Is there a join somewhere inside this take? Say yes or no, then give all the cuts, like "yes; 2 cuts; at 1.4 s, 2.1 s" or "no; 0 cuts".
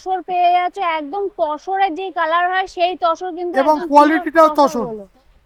no; 0 cuts